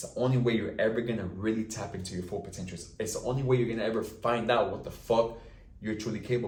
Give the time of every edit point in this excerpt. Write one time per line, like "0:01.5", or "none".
none